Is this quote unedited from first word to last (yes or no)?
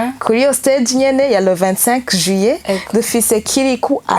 yes